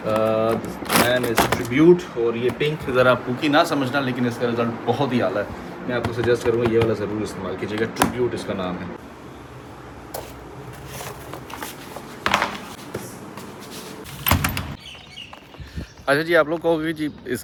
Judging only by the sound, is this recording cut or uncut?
uncut